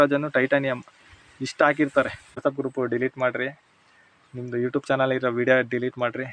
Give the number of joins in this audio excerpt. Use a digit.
1